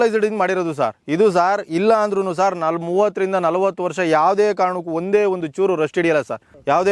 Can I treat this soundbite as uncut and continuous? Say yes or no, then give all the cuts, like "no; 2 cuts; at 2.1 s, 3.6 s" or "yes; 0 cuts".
yes; 0 cuts